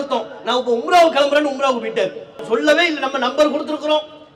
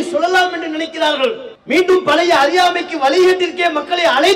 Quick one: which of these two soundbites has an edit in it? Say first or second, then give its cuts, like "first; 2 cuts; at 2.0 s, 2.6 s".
second; 1 cut; at 1.5 s